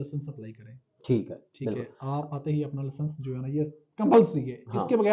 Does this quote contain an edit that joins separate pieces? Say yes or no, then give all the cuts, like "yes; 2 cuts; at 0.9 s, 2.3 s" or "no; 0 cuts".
no; 0 cuts